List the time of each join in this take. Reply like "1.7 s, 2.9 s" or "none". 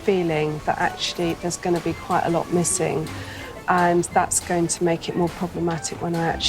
none